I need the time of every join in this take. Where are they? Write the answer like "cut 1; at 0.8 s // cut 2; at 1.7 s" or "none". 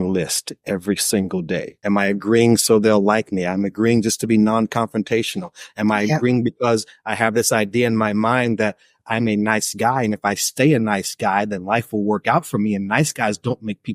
cut 1; at 1.7 s